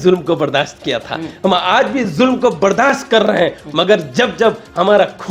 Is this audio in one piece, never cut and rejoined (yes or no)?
yes